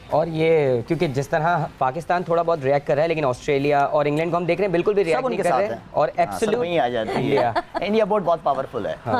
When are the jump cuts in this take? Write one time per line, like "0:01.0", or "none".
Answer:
0:06.7

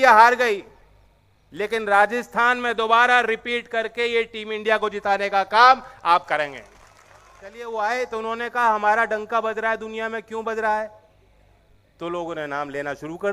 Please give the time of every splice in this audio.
0:07.6

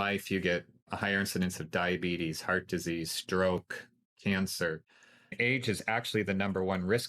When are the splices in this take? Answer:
0:05.3

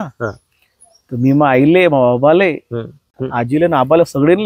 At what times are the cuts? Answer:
0:03.1

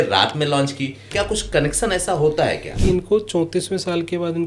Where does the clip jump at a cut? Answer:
0:01.1
0:02.7

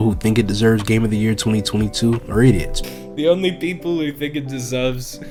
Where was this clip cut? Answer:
none

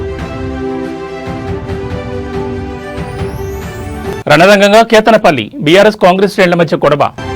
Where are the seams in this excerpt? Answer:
none

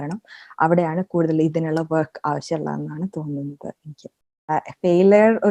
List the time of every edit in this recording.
0:04.4

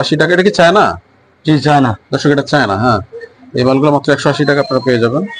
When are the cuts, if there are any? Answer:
none

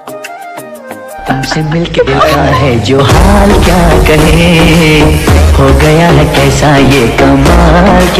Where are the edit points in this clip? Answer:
0:01.2

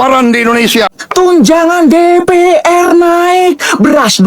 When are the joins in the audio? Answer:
0:01.0

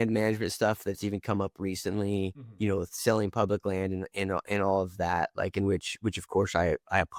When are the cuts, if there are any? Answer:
none

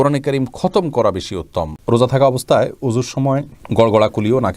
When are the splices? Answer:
0:01.8
0:03.6

